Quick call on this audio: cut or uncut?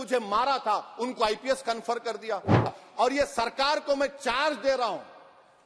cut